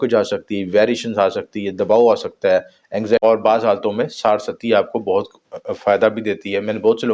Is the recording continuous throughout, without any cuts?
no; 1 cut; at 3.2 s

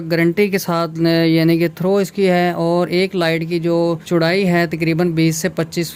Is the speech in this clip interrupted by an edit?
no; 0 cuts

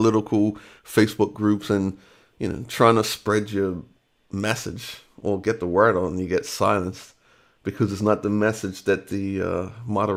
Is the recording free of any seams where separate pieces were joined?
yes; 0 cuts

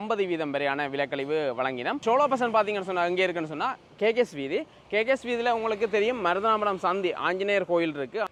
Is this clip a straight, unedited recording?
yes; 0 cuts

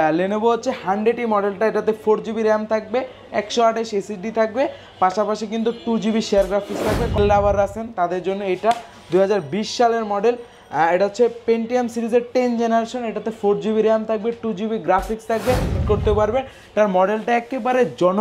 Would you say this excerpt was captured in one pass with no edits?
no; 2 cuts; at 7.2 s, 15.8 s

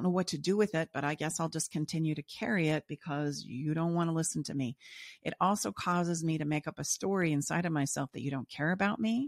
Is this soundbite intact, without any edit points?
yes; 0 cuts

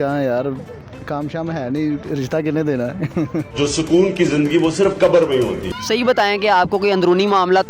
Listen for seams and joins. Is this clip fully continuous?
no; 1 cut; at 5.7 s

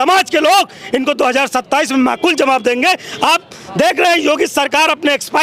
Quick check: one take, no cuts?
yes; 0 cuts

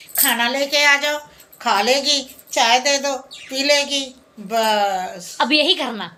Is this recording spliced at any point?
no; 0 cuts

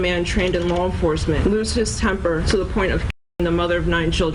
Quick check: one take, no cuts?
no; 2 cuts; at 1.4 s, 2.4 s

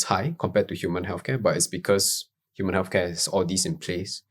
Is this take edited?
no; 0 cuts

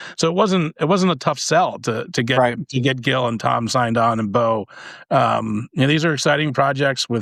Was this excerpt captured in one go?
yes; 0 cuts

